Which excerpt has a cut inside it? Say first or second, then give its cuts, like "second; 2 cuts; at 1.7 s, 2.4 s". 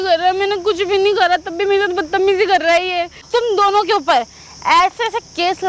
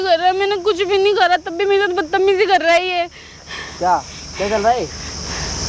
first; 1 cut; at 3.2 s